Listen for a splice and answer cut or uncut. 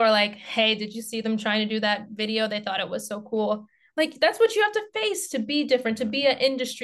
uncut